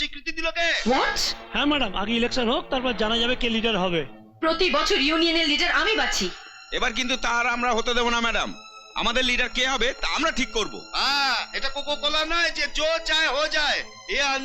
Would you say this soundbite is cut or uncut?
uncut